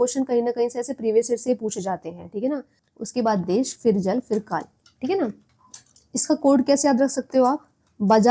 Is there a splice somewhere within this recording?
yes; 1 cut; at 2.8 s

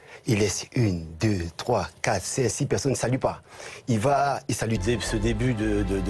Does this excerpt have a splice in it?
no; 0 cuts

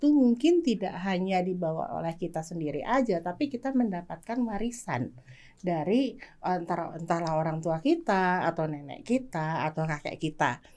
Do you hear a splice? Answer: no; 0 cuts

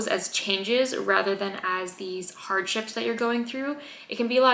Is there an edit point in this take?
no; 0 cuts

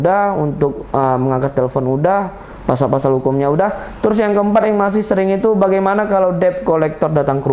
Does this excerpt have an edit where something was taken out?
no; 0 cuts

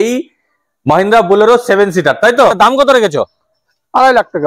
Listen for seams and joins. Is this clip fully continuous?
no; 1 cut; at 2.5 s

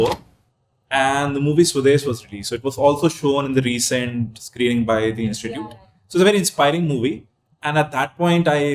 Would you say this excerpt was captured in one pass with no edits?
yes; 0 cuts

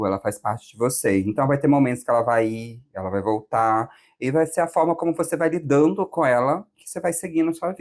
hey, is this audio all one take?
yes; 0 cuts

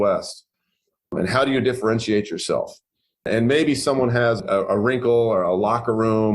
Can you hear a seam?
yes; 3 cuts; at 1.1 s, 3.3 s, 4.4 s

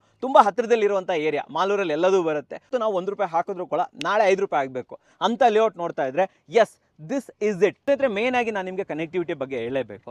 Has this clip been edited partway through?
yes; 2 cuts; at 2.7 s, 7.8 s

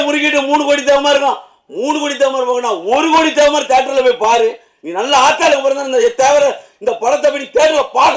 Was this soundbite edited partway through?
no; 0 cuts

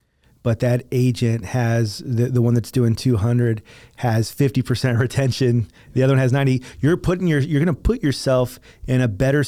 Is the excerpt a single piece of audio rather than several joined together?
yes; 0 cuts

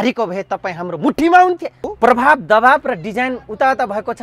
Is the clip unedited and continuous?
no; 1 cut; at 1.9 s

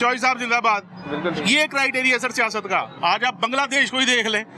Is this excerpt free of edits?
no; 1 cut; at 2.9 s

